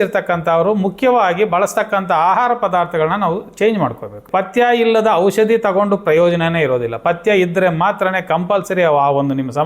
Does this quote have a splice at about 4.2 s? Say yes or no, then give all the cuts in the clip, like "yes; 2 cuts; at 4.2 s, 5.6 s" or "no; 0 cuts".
yes; 1 cut; at 4.2 s